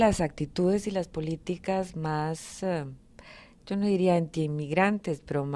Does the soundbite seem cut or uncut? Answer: cut